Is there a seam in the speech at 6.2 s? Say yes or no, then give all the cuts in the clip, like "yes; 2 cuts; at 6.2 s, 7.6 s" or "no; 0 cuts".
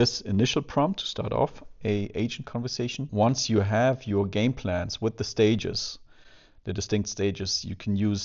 no; 1 cut; at 3.1 s